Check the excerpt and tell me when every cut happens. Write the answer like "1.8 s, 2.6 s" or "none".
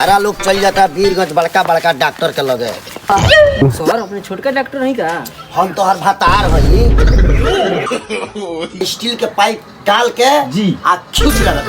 8.8 s